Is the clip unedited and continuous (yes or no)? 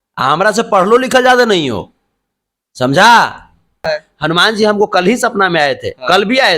no